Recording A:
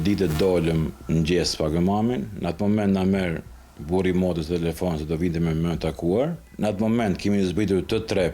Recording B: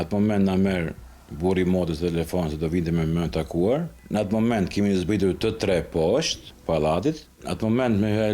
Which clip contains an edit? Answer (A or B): A